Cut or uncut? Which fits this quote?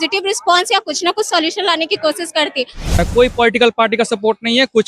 cut